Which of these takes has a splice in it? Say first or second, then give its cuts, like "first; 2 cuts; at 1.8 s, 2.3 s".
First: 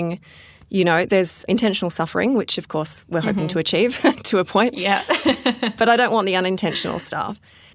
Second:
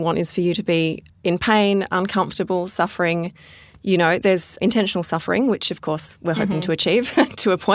second; 1 cut; at 1.1 s